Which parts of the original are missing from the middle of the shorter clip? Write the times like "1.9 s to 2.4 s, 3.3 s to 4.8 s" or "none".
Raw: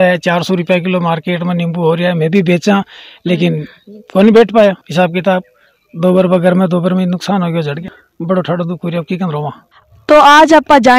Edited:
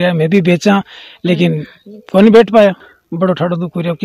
4.8 s to 7.9 s